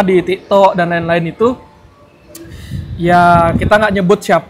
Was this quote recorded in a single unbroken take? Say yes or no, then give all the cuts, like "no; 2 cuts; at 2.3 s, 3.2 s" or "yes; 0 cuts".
yes; 0 cuts